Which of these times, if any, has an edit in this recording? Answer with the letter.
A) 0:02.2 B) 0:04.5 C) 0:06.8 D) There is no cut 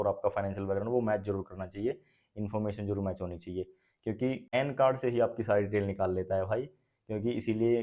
B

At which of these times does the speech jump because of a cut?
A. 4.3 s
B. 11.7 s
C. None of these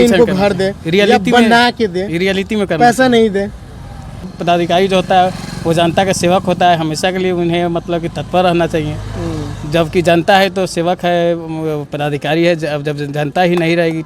A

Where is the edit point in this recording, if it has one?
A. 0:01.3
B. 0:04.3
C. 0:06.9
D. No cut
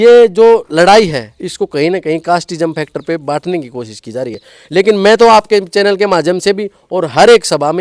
D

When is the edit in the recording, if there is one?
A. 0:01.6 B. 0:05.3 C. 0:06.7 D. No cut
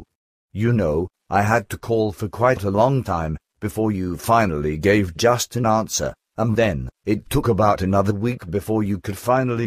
D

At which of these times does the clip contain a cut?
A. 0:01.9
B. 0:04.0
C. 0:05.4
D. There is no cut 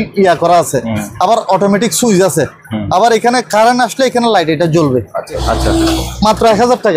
C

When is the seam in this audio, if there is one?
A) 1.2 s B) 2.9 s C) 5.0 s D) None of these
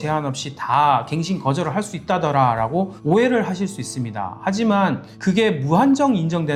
D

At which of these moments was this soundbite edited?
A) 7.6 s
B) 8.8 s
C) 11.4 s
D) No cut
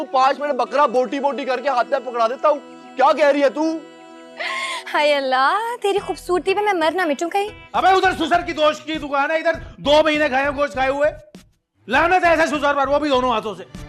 A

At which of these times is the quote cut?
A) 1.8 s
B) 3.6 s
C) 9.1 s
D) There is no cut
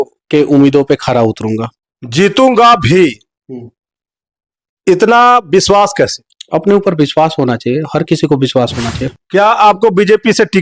C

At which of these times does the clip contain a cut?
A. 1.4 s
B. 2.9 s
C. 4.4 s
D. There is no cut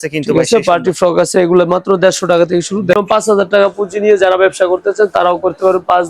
B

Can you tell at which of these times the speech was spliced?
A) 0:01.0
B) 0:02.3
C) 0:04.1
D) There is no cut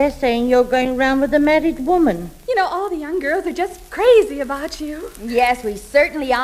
B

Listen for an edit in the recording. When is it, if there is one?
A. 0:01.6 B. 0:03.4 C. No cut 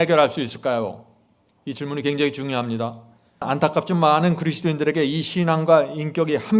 B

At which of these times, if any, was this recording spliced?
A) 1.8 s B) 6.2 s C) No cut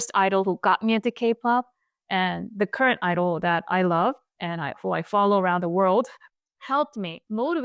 B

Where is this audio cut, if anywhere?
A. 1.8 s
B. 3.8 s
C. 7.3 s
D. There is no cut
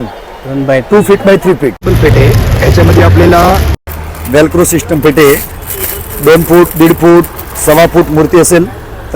A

